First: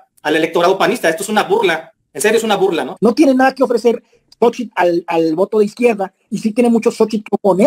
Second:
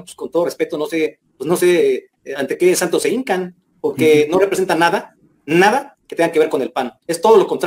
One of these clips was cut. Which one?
first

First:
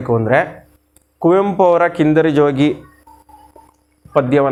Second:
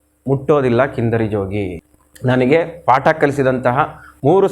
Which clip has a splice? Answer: second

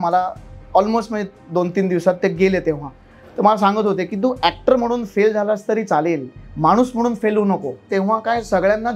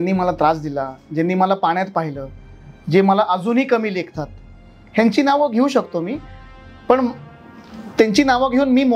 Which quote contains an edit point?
first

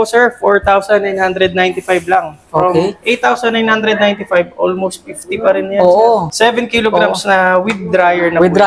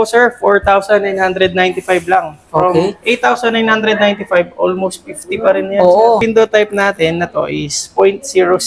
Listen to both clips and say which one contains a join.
second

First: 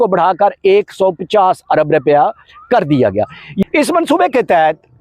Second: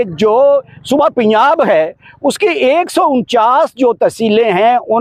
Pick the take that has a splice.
first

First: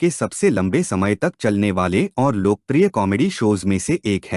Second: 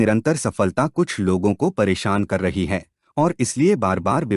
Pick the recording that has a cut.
first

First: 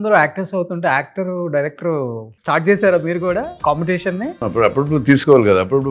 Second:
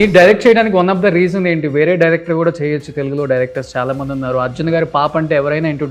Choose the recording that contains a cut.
first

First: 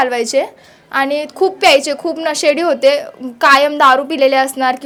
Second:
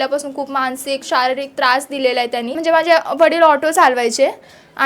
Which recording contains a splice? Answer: second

